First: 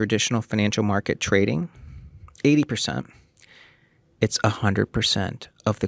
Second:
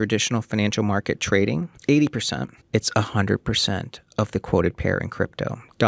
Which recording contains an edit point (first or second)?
second